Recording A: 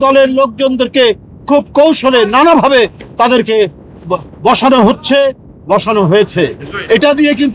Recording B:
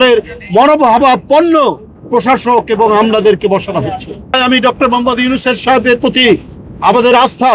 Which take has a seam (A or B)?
B